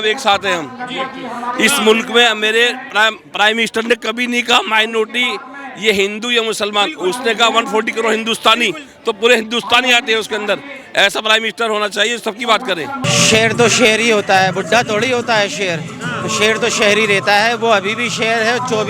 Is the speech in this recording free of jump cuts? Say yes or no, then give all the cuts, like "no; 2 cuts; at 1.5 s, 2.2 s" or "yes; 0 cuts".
no; 1 cut; at 13.0 s